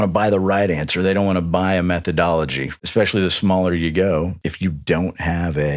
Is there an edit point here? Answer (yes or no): yes